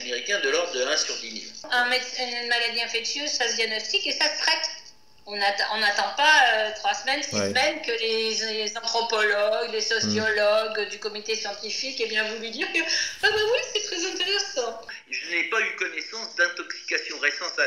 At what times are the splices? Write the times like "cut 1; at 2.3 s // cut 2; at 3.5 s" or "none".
cut 1; at 1.7 s // cut 2; at 14.8 s